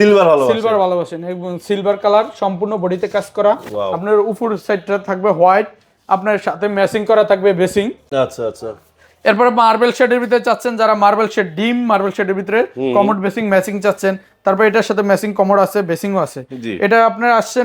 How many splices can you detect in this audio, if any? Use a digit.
0